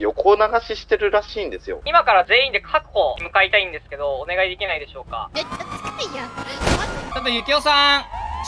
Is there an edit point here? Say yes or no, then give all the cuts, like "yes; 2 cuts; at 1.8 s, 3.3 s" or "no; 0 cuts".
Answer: yes; 4 cuts; at 1.7 s, 3.2 s, 5.3 s, 7.1 s